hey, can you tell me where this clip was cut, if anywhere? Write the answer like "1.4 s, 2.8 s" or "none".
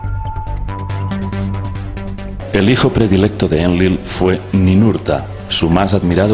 none